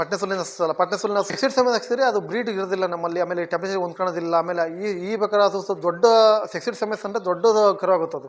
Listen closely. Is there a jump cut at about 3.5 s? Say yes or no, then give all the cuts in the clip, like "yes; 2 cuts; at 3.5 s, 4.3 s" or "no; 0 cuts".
no; 1 cut; at 1.3 s